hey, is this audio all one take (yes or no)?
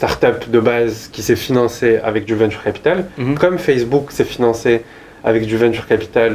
yes